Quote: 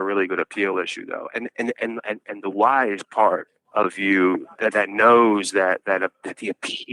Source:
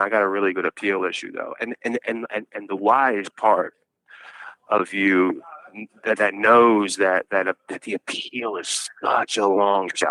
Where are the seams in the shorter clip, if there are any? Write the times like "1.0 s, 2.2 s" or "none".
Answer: 3.6 s, 4.5 s